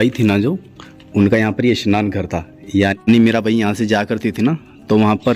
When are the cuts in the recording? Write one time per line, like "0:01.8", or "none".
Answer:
0:03.0